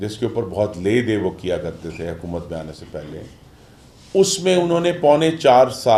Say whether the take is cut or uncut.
uncut